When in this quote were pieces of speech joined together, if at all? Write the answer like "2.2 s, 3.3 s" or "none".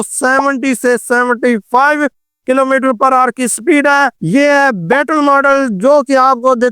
4.2 s

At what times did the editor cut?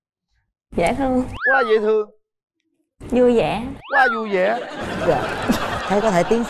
none

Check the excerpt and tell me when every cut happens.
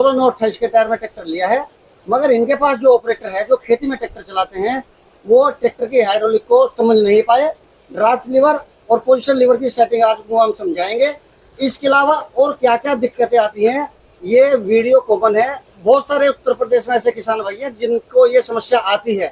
none

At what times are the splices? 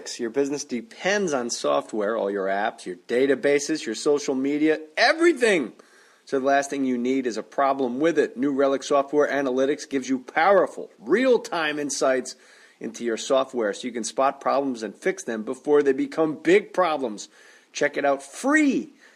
none

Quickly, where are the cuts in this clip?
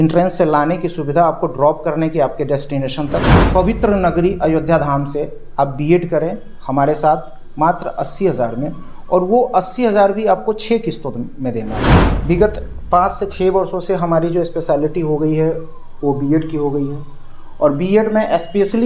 3.4 s, 11.8 s

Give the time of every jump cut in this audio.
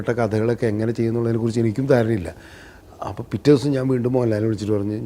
none

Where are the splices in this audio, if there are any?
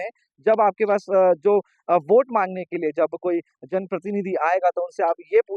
none

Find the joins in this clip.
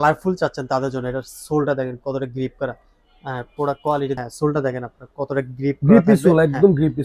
4.2 s

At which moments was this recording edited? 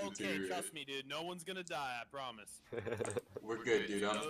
none

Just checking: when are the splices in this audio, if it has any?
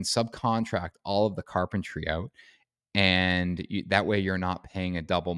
none

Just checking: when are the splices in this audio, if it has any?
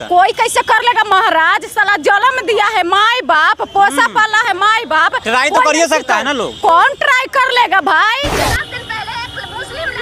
8.4 s

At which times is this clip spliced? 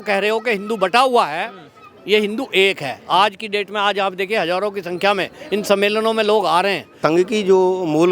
7.0 s

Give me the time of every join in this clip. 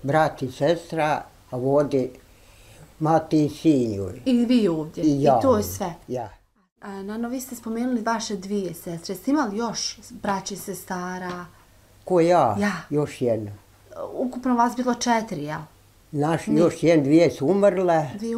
6.7 s

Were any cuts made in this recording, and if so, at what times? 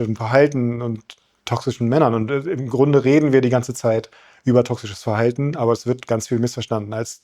none

